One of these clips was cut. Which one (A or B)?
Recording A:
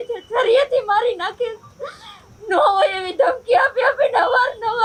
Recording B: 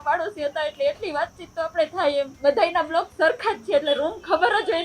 B